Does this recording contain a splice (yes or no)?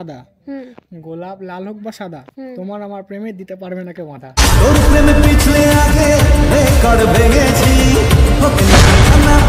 no